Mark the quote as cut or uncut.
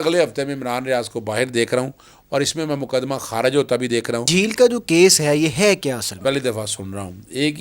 cut